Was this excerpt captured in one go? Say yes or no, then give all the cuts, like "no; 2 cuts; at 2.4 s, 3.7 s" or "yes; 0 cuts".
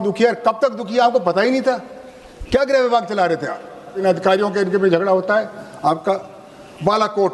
no; 1 cut; at 4.0 s